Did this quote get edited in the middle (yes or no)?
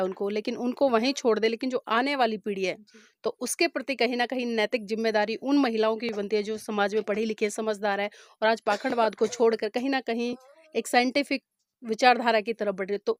no